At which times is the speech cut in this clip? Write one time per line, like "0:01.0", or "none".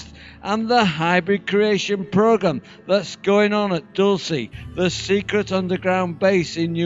none